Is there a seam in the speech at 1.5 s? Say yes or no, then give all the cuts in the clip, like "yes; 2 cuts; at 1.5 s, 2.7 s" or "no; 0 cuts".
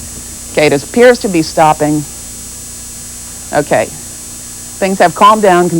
yes; 1 cut; at 1.5 s